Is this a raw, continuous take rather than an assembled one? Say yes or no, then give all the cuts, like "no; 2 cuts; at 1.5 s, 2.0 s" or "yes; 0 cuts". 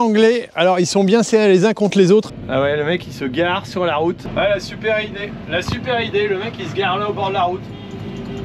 no; 2 cuts; at 2.3 s, 4.2 s